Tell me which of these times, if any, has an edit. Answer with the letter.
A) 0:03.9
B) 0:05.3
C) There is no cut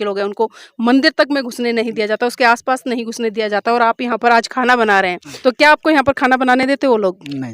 B